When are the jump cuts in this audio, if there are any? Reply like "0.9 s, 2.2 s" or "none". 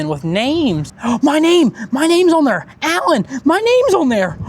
0.9 s